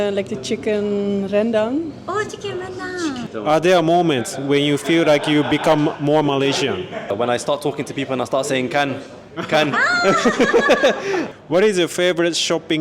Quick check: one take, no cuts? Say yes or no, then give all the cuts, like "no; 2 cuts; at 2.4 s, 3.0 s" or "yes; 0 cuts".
no; 3 cuts; at 3.3 s, 7.1 s, 11.3 s